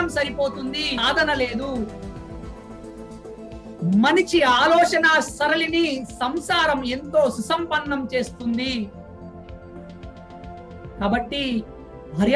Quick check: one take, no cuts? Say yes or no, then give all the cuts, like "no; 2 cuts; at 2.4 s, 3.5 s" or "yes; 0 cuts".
no; 1 cut; at 1.0 s